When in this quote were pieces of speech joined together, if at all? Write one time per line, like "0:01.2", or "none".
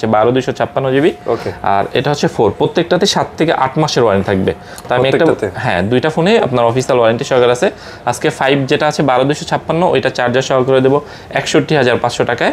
none